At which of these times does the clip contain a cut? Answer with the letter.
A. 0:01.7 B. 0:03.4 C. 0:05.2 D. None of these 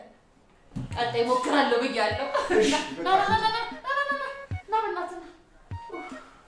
C